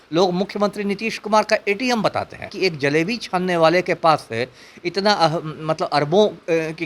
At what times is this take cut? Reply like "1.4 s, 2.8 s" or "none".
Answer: 2.5 s

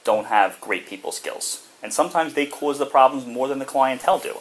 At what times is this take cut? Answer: none

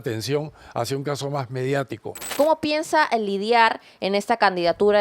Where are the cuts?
2.3 s

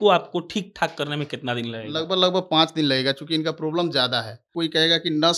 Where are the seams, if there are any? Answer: 4.5 s

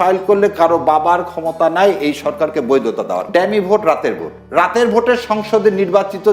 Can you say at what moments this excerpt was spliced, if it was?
3.2 s

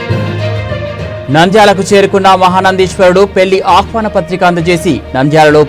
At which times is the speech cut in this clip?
1.2 s

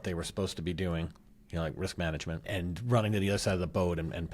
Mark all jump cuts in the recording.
2.4 s

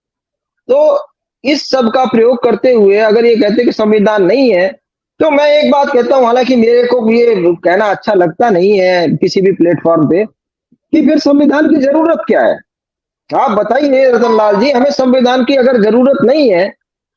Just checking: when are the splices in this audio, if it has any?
none

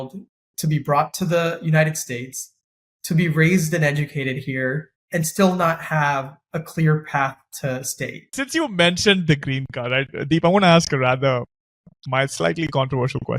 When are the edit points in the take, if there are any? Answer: 5.0 s, 8.5 s

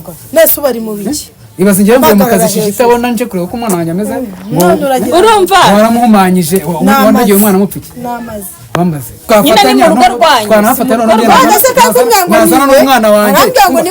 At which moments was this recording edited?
9.3 s

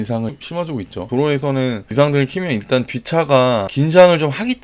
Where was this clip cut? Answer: 1.1 s, 3.7 s

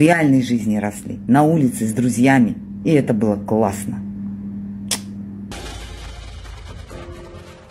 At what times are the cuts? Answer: 5.5 s

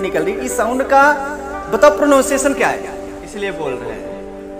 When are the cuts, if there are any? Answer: 3.0 s

